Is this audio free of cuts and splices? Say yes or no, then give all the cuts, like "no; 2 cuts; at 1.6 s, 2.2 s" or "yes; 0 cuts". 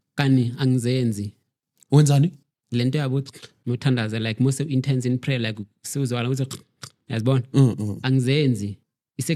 yes; 0 cuts